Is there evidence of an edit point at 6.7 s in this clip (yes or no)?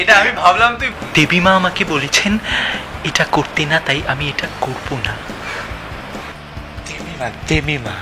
no